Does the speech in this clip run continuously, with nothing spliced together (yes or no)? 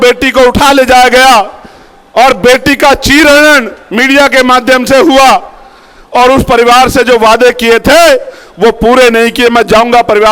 yes